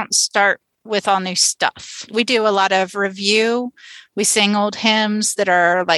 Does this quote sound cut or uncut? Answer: uncut